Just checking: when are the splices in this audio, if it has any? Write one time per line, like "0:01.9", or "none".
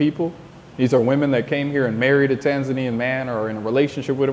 none

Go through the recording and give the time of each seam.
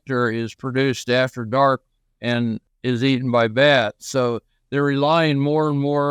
0:02.7

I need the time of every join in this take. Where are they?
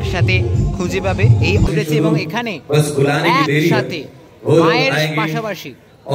0:01.7

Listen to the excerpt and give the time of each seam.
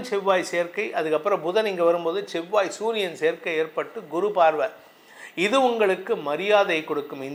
none

